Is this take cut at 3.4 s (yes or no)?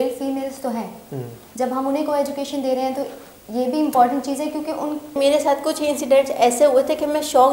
no